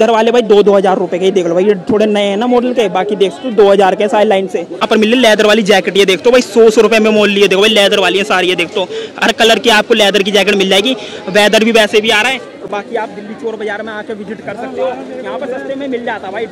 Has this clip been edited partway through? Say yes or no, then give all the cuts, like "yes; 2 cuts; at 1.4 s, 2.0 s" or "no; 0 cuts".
no; 0 cuts